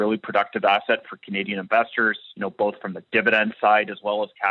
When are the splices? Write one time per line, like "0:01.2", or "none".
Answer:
none

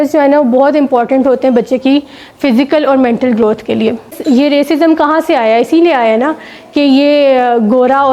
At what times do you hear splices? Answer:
0:04.2

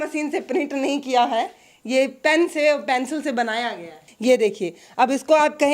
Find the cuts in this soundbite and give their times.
0:04.0

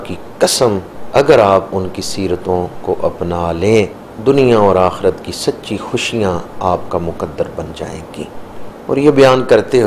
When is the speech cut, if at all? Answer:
0:00.9
0:04.0
0:08.7

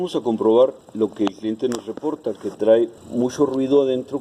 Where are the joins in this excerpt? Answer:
0:00.8
0:03.0

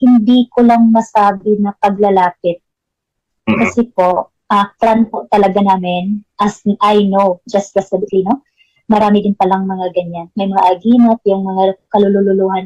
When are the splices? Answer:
none

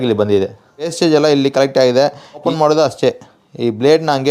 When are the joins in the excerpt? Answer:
0:00.9
0:02.4

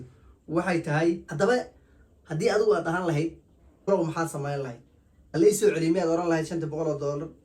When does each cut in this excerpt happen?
0:01.3
0:03.9

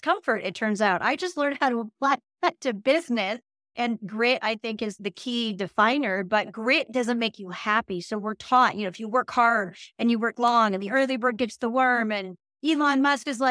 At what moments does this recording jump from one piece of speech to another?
0:03.7
0:05.0

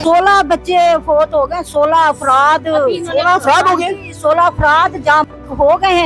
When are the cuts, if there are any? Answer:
none

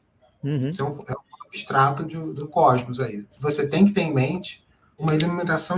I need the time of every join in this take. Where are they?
0:02.4
0:03.3
0:05.0

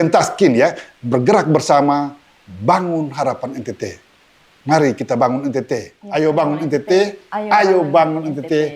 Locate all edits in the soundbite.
0:06.0

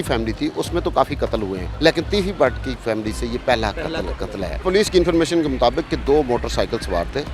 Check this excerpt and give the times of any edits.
0:01.6
0:04.6

